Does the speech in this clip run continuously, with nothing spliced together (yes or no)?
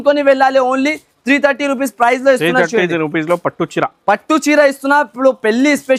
yes